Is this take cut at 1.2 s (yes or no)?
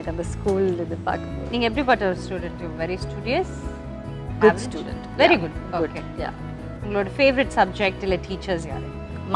no